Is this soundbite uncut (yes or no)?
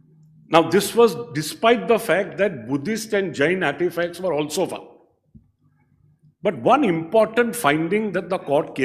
yes